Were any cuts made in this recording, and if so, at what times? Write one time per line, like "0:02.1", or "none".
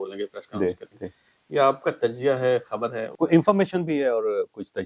0:03.0